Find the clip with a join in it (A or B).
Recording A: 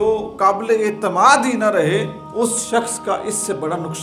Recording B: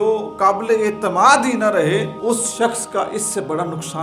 B